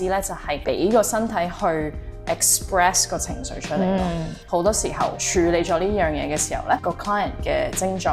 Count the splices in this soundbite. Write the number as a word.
two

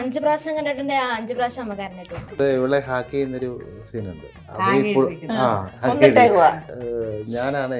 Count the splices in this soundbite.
four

